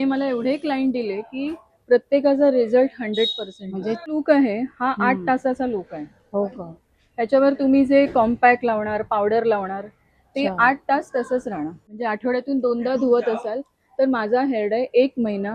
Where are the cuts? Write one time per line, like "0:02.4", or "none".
0:04.1
0:11.9